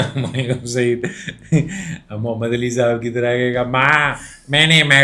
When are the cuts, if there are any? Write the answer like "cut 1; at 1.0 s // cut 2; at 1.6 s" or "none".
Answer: none